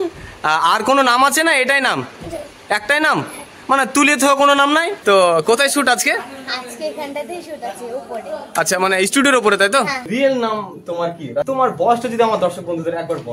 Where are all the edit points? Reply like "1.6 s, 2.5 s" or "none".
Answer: 4.9 s, 10.0 s, 11.5 s